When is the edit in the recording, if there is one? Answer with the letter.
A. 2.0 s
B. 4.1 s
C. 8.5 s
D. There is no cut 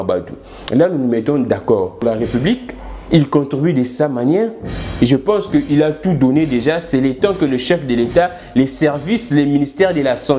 A